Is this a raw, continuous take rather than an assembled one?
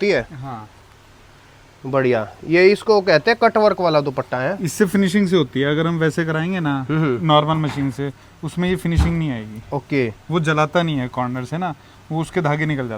yes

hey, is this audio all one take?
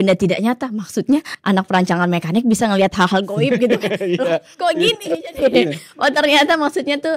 yes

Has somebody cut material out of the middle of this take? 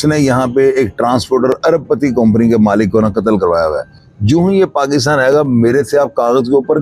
yes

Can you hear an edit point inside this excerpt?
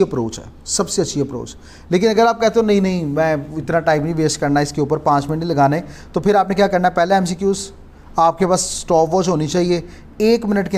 no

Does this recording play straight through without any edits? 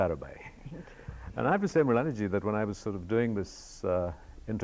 yes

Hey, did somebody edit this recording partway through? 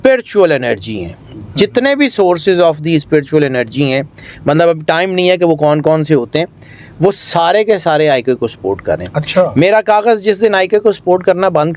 no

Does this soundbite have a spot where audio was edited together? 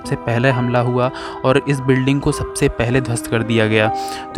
no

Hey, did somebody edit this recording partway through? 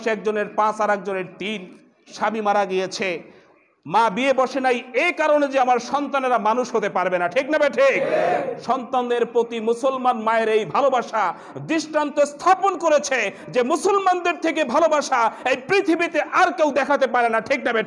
no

